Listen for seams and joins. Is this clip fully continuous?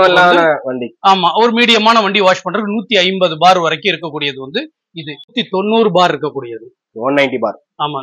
no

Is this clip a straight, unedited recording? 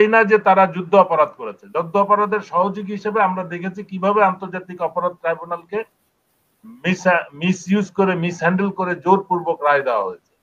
yes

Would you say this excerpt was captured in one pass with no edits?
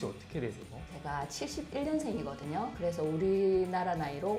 yes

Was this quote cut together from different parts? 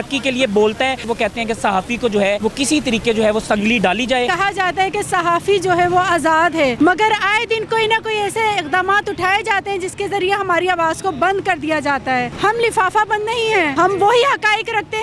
yes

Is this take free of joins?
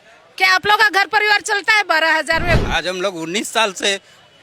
no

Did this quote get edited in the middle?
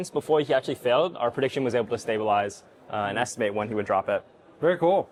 no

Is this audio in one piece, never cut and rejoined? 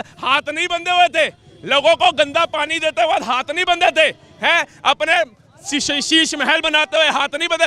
yes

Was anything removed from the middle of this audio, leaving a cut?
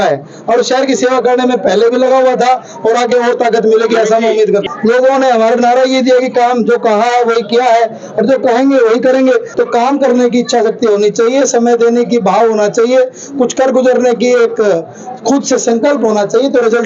yes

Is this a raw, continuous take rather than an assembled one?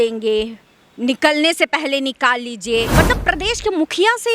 no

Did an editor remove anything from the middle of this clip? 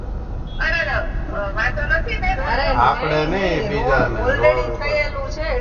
no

